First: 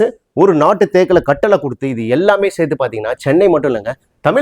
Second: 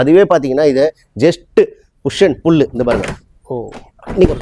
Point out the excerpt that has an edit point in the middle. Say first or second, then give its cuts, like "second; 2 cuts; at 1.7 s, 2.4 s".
first; 1 cut; at 3.2 s